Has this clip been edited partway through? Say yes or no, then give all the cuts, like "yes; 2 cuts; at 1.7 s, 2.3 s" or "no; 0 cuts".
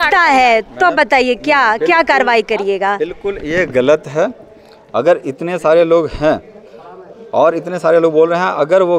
no; 0 cuts